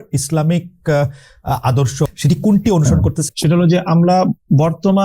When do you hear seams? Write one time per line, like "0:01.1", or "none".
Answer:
0:02.1
0:03.2